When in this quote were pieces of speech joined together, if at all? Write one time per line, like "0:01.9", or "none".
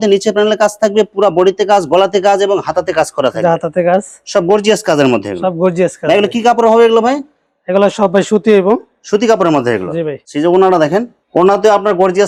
none